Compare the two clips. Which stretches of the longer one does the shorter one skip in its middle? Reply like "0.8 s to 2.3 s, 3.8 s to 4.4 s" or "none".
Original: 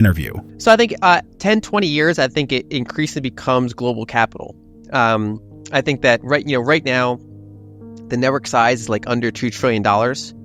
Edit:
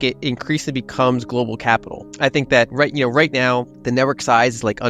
4.5 s to 5.5 s, 7.3 s to 8.0 s